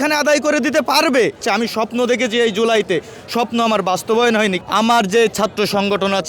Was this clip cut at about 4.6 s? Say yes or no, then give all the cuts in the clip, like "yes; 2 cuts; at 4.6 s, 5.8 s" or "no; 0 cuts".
yes; 2 cuts; at 1.4 s, 4.6 s